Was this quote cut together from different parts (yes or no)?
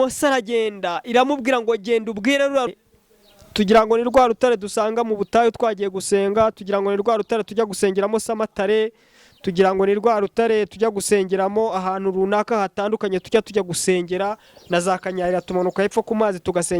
yes